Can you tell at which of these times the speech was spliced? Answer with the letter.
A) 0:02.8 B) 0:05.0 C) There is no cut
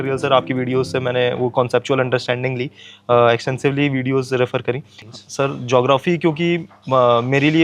B